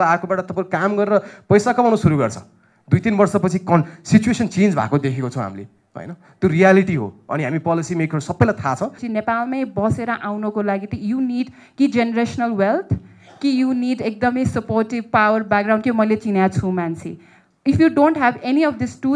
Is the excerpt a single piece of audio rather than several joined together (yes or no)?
no